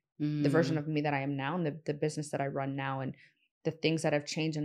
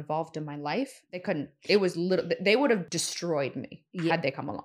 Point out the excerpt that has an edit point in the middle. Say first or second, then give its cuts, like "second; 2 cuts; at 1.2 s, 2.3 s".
second; 2 cuts; at 1.2 s, 3.0 s